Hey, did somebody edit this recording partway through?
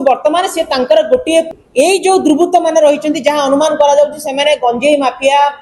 yes; 1 cut; at 1.5 s

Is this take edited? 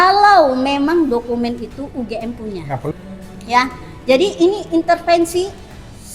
yes; 1 cut; at 2.9 s

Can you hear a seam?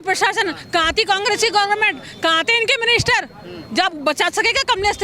no; 0 cuts

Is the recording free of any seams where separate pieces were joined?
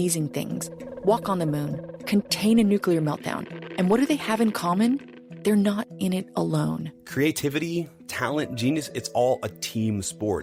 yes; 0 cuts

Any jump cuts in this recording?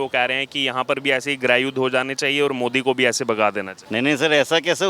yes; 1 cut; at 3.7 s

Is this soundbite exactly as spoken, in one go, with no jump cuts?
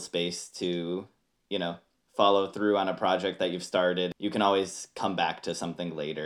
no; 1 cut; at 4.1 s

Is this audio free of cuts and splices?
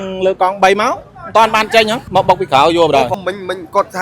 no; 2 cuts; at 2.0 s, 3.1 s

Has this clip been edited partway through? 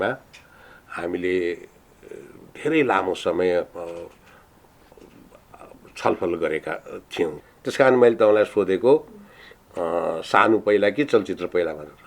yes; 1 cut; at 7.4 s

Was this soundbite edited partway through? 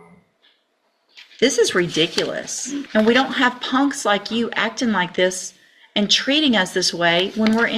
yes; 1 cut; at 2.8 s

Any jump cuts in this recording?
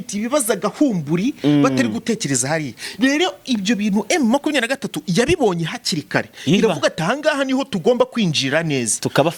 no; 0 cuts

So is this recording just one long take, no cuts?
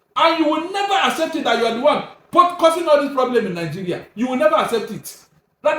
yes; 0 cuts

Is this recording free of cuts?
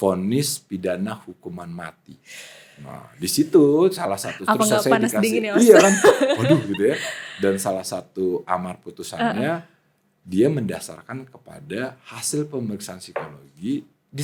yes; 0 cuts

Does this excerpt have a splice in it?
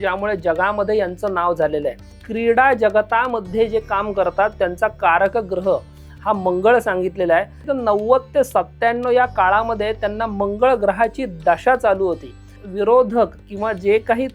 yes; 3 cuts; at 2.2 s, 7.6 s, 12.6 s

